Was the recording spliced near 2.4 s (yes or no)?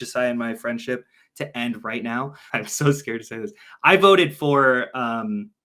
yes